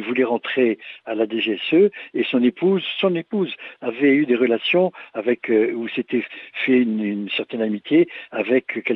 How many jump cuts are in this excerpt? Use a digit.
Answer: 0